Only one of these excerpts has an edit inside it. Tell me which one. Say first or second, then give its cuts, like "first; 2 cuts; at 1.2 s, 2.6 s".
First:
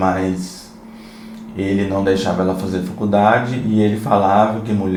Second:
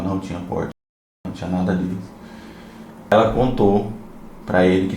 second; 1 cut; at 3.1 s